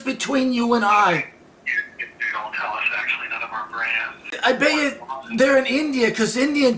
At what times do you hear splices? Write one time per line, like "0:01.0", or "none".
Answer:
0:04.4